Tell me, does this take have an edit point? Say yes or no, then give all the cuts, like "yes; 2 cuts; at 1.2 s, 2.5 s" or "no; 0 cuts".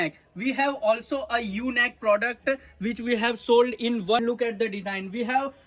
yes; 1 cut; at 4.2 s